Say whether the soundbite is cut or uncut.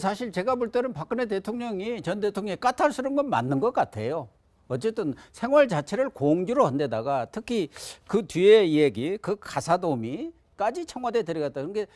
cut